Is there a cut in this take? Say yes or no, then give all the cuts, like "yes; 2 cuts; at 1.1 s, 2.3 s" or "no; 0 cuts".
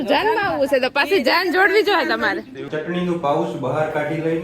yes; 1 cut; at 2.6 s